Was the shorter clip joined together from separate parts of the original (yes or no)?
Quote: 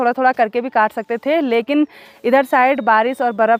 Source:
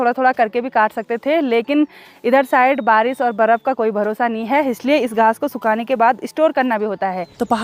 no